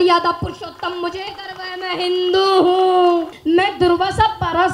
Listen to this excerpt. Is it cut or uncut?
cut